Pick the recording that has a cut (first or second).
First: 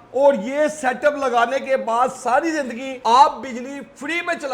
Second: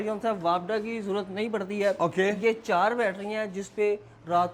first